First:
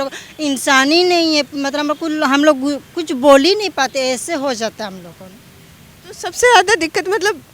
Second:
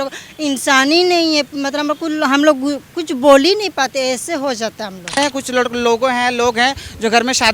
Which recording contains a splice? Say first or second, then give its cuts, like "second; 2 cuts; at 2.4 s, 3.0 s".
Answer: second; 1 cut; at 5.2 s